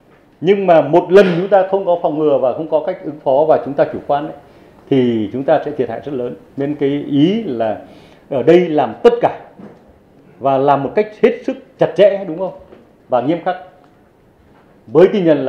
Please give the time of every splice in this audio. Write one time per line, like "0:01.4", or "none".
none